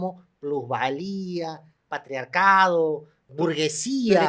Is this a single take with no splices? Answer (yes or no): no